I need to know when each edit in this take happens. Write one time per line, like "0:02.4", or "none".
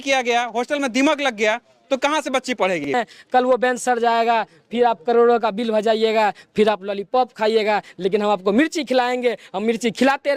0:02.9

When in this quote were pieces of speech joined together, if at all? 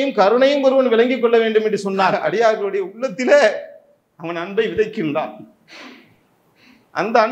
0:02.2

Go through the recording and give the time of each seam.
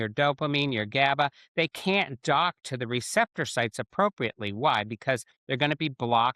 none

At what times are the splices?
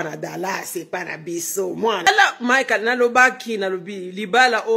0:02.1

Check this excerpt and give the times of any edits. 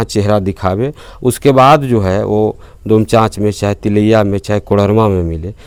none

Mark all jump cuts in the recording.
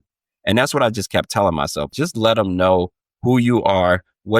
0:01.9

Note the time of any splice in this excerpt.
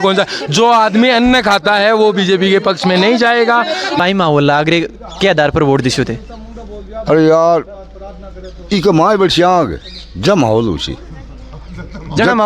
0:04.0

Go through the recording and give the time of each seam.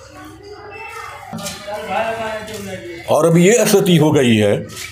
0:01.3

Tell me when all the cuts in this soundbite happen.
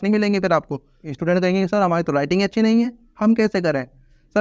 0:01.1

